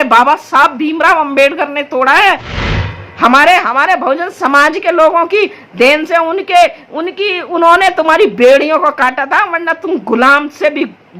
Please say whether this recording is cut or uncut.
cut